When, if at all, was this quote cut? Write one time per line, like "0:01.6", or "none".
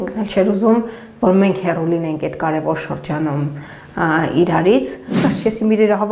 0:05.2